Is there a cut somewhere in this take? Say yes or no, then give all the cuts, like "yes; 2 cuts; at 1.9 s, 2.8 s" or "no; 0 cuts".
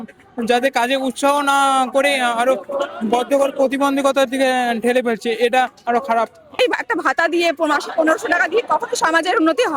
yes; 1 cut; at 6.6 s